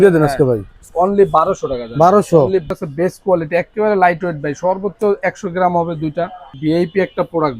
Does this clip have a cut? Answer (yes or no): yes